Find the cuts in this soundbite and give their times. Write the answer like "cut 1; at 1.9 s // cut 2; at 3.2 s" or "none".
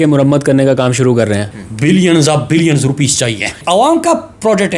cut 1; at 1.5 s // cut 2; at 3.6 s